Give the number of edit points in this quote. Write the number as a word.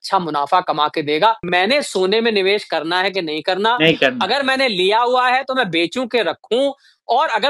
one